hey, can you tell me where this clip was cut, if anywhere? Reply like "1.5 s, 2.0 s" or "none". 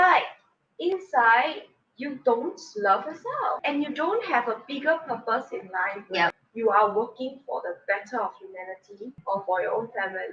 3.6 s, 6.4 s, 9.2 s